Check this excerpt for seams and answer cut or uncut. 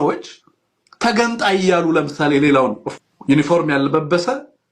cut